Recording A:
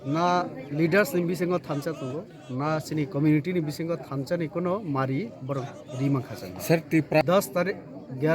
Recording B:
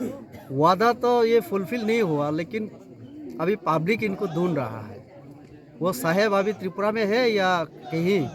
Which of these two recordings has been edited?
A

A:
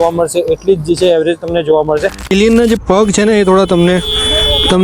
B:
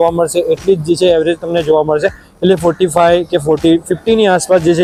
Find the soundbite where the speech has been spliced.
A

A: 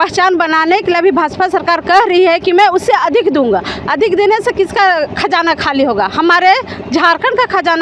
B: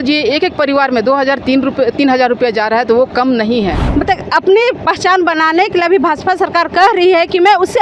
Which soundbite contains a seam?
B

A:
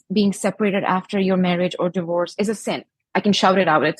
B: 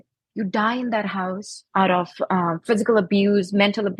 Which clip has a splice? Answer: A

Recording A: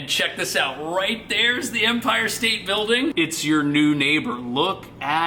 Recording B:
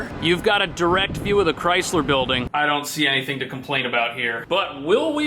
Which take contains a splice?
B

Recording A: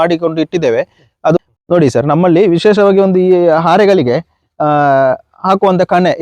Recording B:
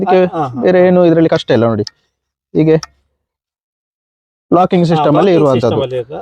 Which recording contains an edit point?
A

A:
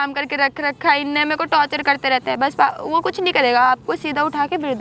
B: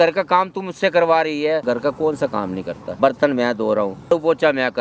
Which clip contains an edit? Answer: B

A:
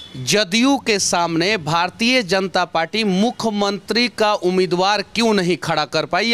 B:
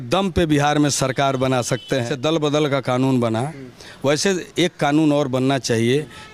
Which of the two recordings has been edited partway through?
B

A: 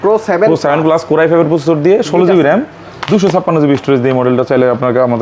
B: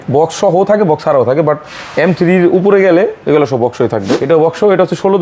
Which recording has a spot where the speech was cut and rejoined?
B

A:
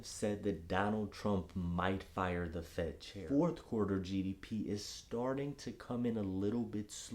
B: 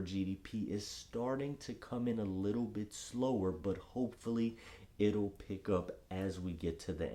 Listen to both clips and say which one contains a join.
A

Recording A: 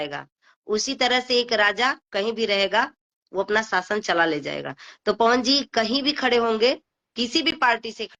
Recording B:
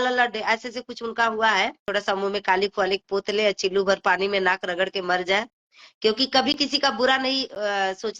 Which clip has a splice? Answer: B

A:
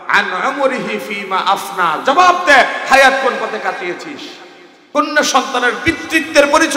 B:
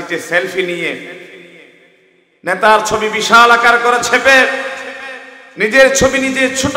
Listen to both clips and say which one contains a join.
A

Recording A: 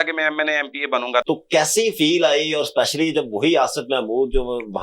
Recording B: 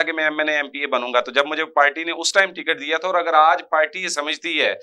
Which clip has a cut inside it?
A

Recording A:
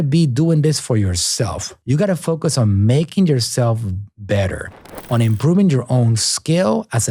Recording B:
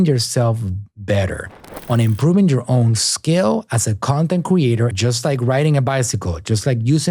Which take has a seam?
B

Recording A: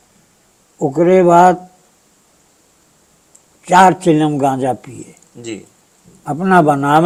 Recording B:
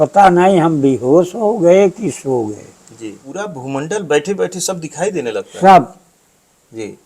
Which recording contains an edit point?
B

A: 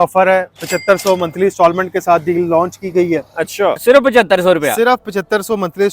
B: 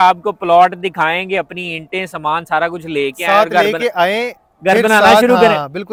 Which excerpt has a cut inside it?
A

